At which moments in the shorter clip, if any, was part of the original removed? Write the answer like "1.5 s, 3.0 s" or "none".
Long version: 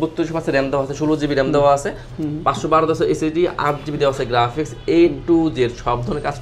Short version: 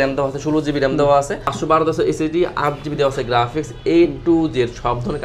1.5 s